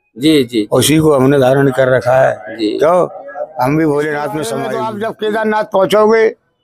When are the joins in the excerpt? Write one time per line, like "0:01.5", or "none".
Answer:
0:04.7